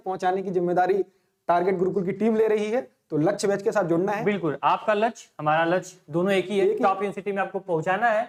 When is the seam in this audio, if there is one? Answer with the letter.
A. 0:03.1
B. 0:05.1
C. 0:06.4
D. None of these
D